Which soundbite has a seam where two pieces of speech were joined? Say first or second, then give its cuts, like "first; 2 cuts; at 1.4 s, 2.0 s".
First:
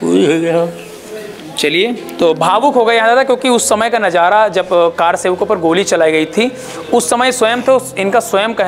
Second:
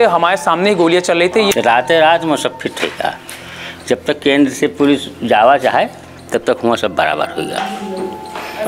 second; 1 cut; at 1.5 s